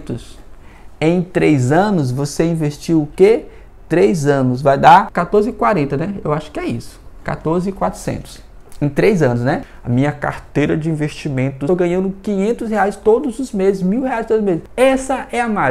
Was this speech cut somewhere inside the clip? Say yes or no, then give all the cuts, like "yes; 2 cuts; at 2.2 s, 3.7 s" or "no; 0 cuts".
yes; 4 cuts; at 5.2 s, 9.6 s, 11.7 s, 14.7 s